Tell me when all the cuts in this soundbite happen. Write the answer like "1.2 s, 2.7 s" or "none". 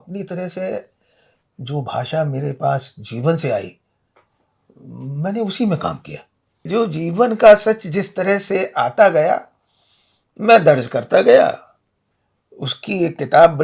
6.7 s